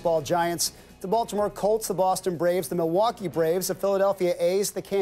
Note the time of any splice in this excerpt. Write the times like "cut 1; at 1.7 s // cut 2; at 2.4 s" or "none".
cut 1; at 2.3 s

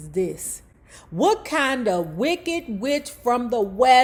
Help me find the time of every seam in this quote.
none

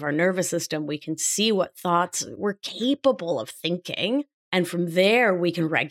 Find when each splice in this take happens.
cut 1; at 4.4 s

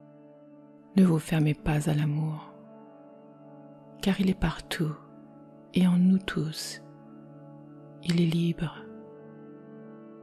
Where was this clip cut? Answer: cut 1; at 0.9 s // cut 2; at 2.4 s // cut 3; at 4.0 s // cut 4; at 6.6 s // cut 5; at 8.0 s // cut 6; at 8.7 s

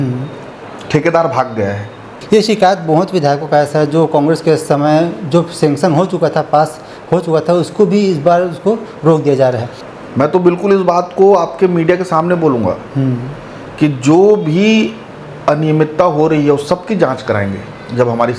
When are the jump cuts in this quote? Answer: cut 1; at 2.2 s // cut 2; at 9.7 s

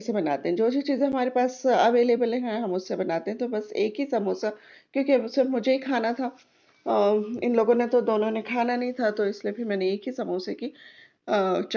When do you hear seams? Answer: none

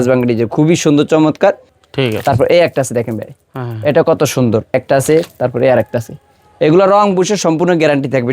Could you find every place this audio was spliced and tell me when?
cut 1; at 1.7 s // cut 2; at 4.7 s

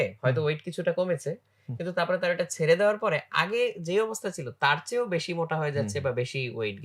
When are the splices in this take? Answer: none

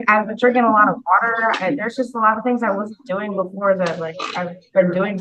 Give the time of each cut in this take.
none

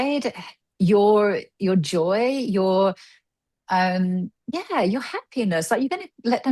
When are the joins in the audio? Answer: cut 1; at 4.4 s

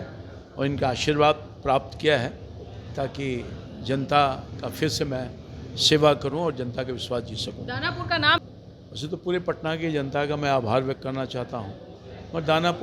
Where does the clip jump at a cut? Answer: cut 1; at 8.4 s

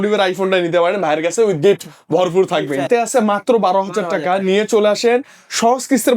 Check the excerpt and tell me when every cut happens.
cut 1; at 2.9 s

